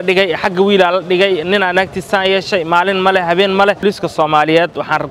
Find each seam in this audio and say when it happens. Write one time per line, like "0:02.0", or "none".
0:03.8